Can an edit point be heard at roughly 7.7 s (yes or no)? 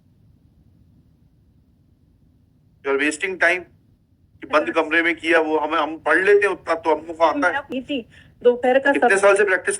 yes